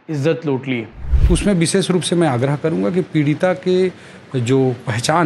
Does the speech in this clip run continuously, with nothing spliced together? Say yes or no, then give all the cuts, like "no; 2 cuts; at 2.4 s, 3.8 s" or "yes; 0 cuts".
no; 1 cut; at 1.1 s